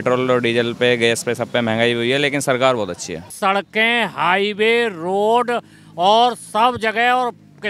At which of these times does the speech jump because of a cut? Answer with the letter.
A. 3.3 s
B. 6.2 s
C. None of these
A